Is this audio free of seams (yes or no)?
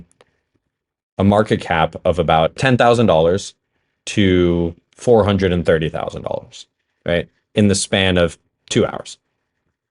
no